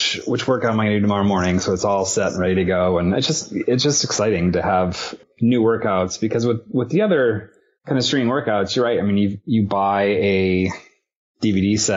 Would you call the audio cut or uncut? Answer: cut